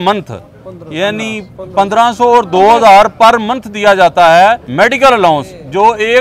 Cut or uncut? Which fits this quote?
cut